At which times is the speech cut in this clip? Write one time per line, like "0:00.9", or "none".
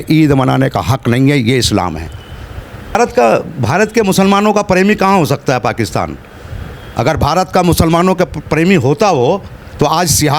0:02.9

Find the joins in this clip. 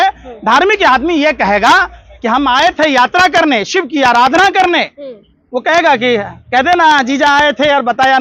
none

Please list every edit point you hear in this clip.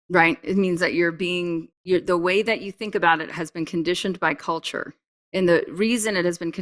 0:01.7

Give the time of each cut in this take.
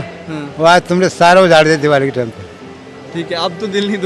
none

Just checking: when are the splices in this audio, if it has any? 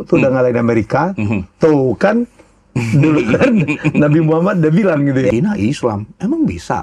0:05.3

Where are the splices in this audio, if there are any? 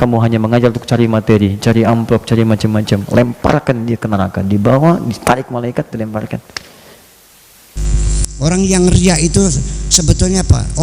0:08.0

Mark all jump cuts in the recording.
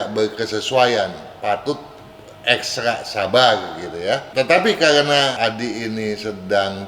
0:04.3
0:05.4

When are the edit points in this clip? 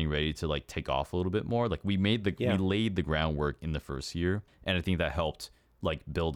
none

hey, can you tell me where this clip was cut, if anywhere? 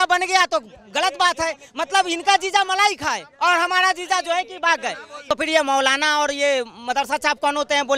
0:05.3

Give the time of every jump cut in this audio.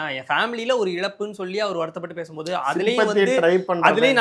none

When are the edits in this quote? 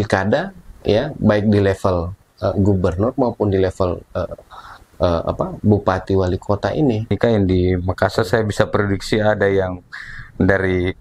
0:07.1

